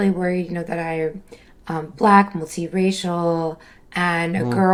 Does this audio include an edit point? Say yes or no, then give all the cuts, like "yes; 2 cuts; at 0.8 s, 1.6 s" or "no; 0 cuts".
no; 0 cuts